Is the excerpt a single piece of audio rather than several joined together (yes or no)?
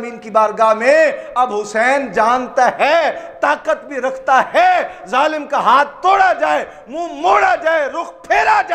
yes